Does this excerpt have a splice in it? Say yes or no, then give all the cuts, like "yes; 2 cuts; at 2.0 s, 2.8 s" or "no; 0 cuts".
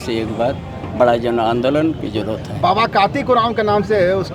no; 0 cuts